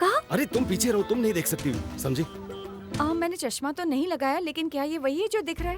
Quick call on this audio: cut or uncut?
cut